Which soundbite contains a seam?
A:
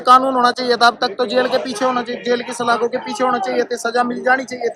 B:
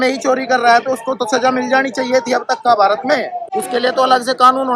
B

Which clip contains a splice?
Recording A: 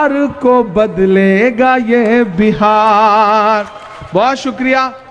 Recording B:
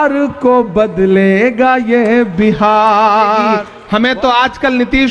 B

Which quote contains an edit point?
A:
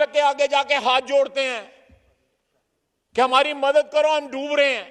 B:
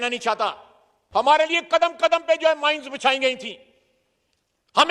B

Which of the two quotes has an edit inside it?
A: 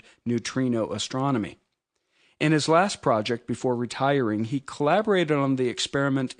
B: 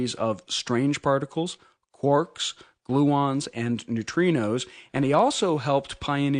B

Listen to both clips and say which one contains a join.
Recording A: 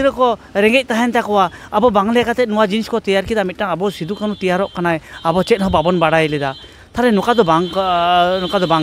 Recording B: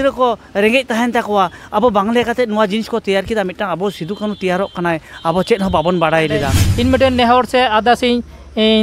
B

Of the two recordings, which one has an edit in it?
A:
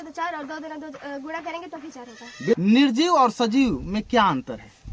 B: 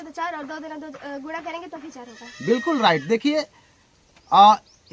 A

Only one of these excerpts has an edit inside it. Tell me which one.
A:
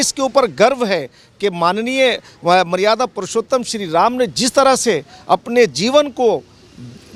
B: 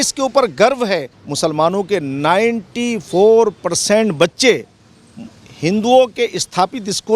B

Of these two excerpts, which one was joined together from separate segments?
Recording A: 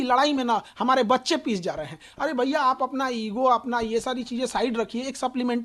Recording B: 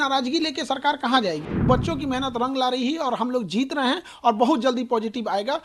B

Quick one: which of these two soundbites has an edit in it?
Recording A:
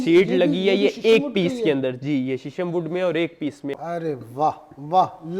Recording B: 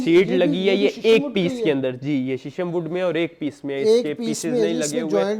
A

